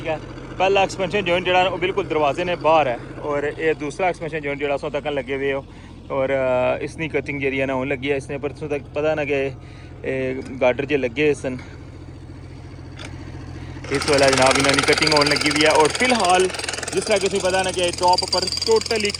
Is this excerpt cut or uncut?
uncut